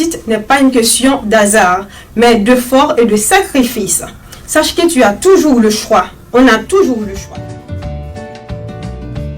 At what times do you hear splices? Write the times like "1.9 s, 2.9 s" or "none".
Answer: 7.2 s